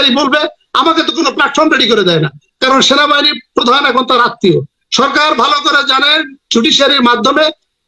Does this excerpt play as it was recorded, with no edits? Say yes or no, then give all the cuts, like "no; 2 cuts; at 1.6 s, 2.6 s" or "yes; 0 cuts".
no; 1 cut; at 2.4 s